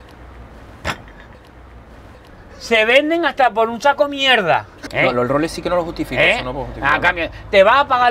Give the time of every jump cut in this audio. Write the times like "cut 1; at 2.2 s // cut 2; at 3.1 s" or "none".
cut 1; at 4.8 s